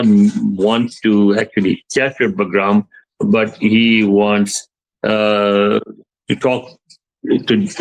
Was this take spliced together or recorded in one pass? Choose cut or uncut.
uncut